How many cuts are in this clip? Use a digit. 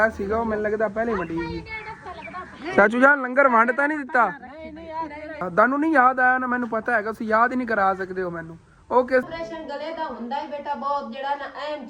2